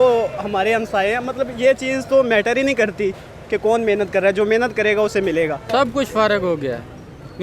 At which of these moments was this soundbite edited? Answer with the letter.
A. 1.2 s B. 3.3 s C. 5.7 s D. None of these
C